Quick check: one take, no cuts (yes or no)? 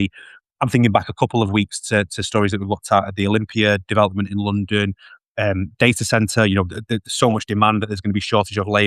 yes